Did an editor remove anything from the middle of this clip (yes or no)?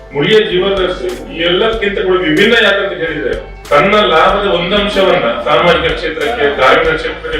yes